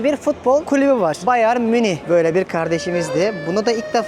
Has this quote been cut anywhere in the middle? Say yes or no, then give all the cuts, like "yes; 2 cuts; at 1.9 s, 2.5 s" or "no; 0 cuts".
yes; 2 cuts; at 0.9 s, 2.0 s